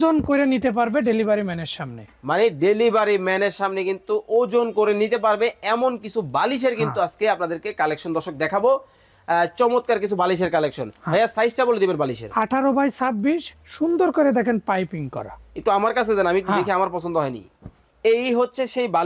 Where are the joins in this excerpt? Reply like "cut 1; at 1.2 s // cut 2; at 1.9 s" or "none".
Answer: none